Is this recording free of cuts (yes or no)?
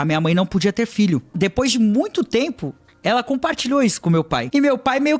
no